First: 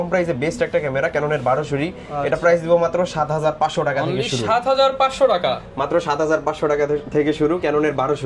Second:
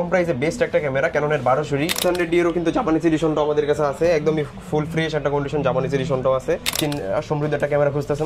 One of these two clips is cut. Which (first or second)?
second